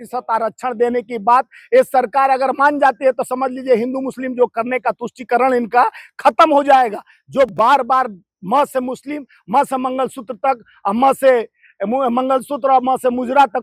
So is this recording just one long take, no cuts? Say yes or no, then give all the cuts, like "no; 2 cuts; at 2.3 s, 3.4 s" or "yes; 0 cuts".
yes; 0 cuts